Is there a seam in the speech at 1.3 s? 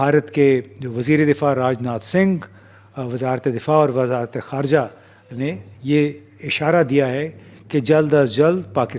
no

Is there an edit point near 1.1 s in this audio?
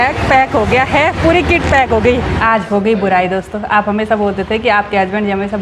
no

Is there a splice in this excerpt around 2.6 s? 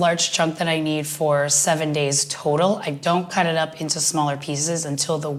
no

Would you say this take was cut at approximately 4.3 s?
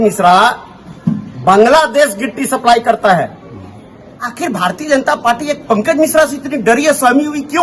yes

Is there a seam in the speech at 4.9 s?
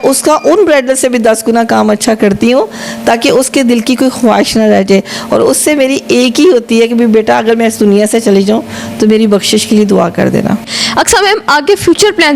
no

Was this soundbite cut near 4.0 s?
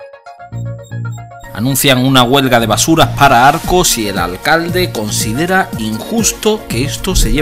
no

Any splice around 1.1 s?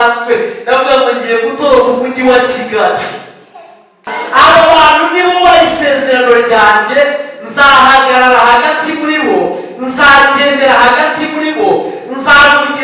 no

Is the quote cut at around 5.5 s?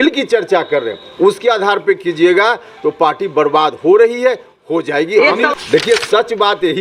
yes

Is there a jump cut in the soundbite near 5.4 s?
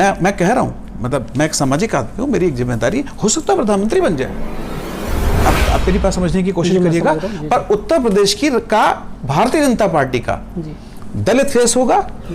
yes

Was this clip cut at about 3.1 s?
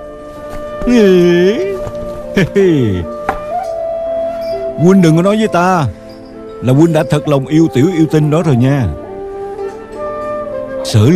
yes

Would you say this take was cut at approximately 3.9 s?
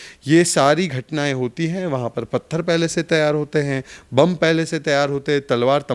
no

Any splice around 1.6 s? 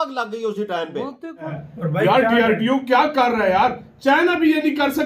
yes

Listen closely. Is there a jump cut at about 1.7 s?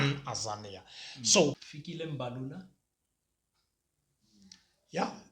yes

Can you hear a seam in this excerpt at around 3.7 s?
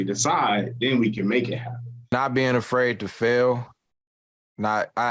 no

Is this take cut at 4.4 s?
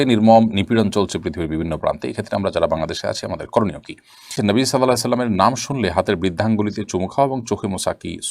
yes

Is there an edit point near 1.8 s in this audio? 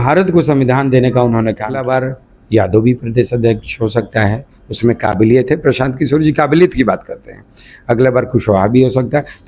yes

